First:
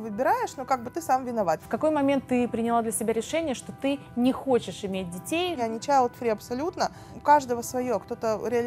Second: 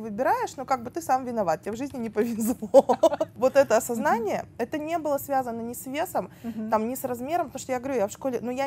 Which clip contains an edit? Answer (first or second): first